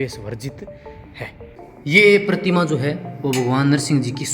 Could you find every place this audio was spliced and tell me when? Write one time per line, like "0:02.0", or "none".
0:01.9